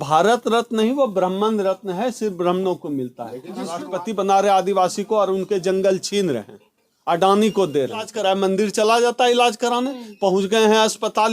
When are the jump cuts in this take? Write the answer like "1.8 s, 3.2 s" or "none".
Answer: 3.9 s, 8.1 s